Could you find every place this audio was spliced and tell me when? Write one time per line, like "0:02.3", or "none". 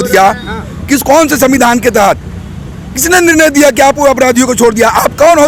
none